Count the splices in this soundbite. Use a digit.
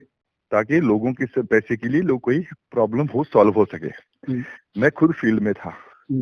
0